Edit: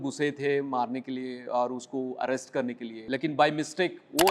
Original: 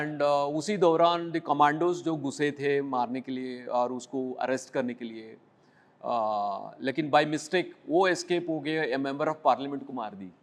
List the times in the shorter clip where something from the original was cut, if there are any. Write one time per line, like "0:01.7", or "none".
0:03.0